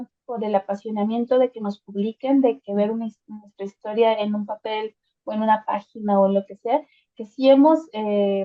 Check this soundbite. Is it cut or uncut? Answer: uncut